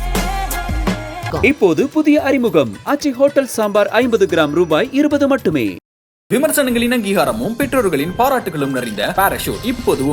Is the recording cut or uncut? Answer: uncut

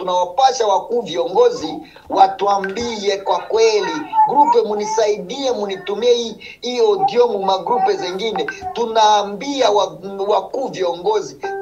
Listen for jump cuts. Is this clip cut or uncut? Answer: uncut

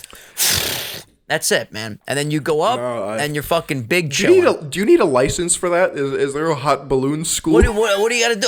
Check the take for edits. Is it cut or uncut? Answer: uncut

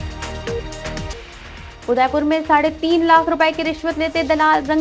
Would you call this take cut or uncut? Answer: cut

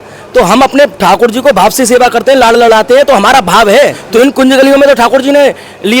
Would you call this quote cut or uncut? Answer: cut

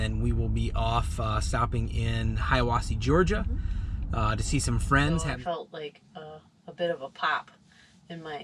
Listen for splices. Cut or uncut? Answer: cut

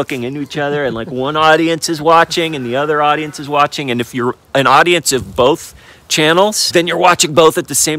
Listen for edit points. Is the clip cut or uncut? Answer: uncut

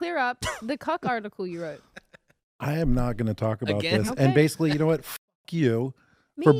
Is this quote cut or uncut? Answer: uncut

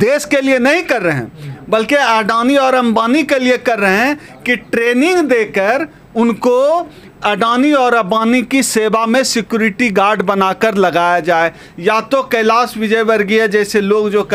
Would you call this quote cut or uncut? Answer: uncut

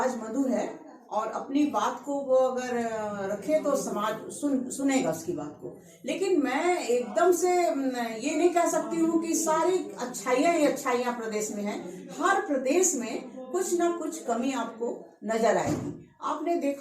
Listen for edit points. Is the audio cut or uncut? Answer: uncut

